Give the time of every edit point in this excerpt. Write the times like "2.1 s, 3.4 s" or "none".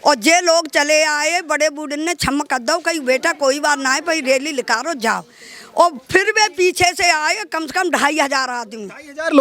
none